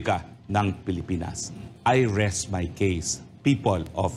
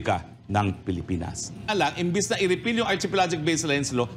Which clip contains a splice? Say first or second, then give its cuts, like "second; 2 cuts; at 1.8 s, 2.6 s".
second; 1 cut; at 1.7 s